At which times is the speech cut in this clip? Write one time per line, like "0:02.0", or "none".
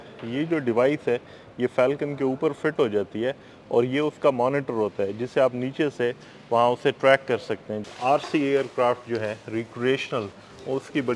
0:07.7

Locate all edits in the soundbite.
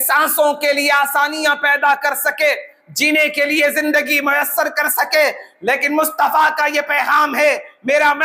none

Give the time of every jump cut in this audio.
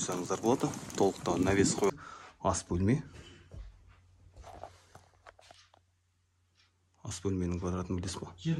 0:01.9

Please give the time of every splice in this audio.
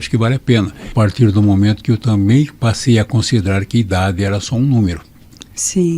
0:00.9

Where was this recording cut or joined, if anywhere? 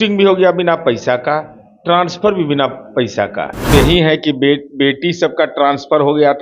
0:03.7

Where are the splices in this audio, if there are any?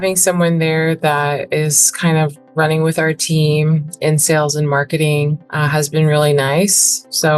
0:05.5

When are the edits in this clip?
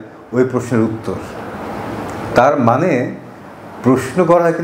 none

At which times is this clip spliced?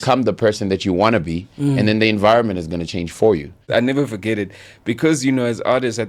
0:03.6

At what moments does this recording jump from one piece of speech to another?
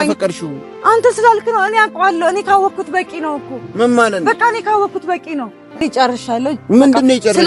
0:05.8

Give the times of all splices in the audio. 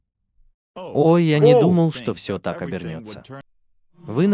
0:03.4

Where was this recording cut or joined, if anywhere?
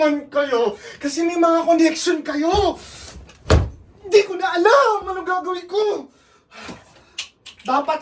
none

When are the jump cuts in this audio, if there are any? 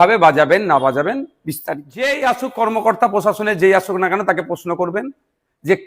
0:01.9

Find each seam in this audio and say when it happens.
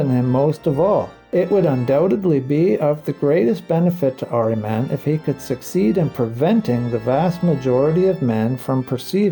0:01.2

